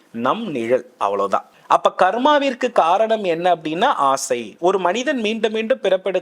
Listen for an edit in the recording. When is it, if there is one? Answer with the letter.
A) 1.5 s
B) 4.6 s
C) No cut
A